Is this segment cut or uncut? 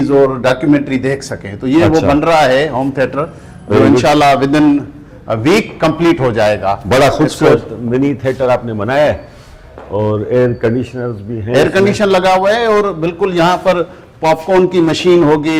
uncut